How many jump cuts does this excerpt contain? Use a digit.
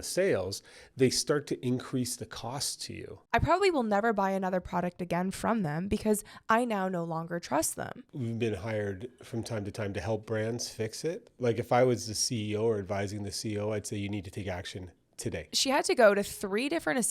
2